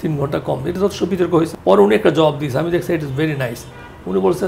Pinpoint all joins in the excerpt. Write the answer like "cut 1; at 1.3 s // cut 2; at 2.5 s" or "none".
cut 1; at 1.5 s